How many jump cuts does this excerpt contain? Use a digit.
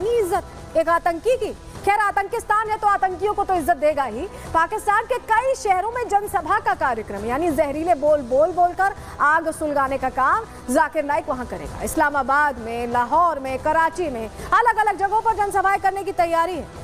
0